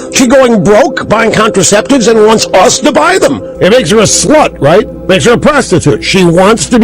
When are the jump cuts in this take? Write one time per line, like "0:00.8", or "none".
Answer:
0:03.5
0:05.0